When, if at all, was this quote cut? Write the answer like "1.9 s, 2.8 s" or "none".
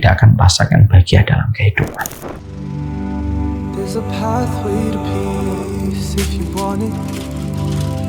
2.5 s